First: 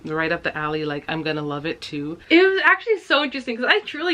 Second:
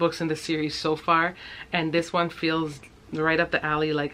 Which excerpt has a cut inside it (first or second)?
first